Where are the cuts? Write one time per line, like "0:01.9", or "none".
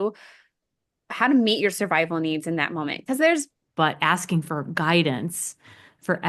0:03.6